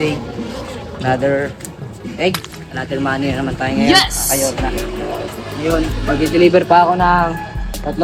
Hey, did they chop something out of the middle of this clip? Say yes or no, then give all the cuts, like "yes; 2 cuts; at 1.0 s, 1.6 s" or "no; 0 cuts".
no; 0 cuts